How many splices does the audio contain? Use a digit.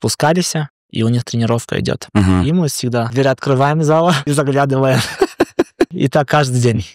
3